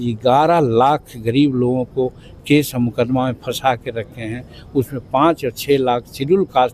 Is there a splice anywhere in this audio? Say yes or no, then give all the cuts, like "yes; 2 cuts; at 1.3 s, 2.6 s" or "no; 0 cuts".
no; 0 cuts